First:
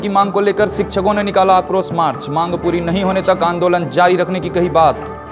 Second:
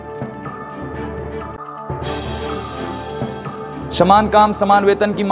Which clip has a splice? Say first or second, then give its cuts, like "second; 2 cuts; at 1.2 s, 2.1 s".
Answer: second; 2 cuts; at 1.5 s, 3.1 s